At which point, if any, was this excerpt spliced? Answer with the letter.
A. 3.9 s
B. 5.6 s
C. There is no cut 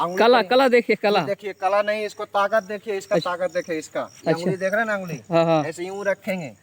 C